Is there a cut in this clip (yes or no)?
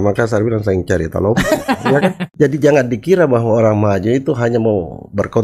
yes